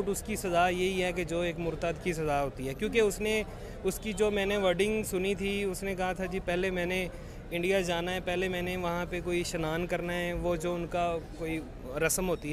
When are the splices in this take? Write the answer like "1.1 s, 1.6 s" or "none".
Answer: none